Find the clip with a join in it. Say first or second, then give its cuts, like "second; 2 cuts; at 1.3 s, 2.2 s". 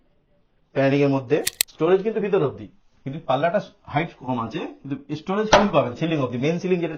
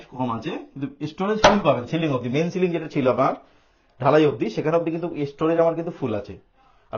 first; 1 cut; at 1.6 s